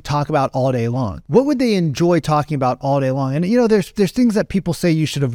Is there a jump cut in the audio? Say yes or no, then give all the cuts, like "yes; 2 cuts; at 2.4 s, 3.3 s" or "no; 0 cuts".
no; 0 cuts